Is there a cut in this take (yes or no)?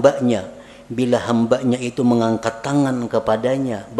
no